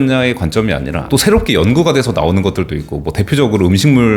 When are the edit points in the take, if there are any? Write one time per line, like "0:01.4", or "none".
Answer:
0:01.0

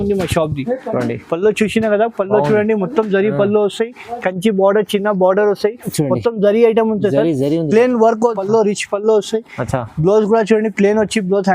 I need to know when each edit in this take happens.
0:08.4

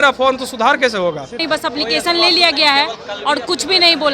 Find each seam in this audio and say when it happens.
0:01.4

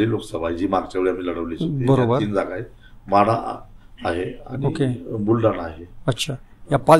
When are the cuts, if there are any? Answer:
none

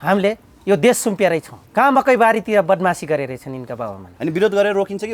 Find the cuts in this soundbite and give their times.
0:01.6
0:04.0

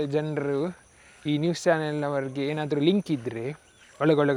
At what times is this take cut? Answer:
none

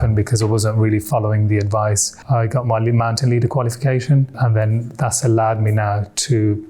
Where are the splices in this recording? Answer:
0:02.1
0:04.4

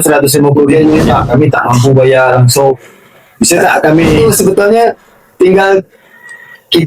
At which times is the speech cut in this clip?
0:01.2
0:04.2

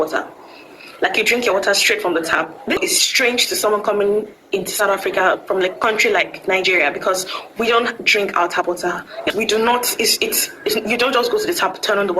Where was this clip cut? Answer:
0:02.8
0:09.3

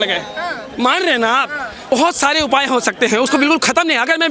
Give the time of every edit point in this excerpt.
0:01.9

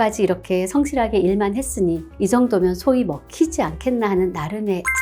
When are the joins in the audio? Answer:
none

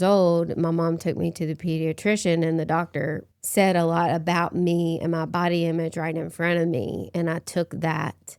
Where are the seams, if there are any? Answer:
0:03.2

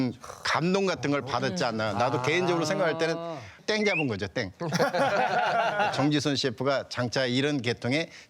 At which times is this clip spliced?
0:05.9

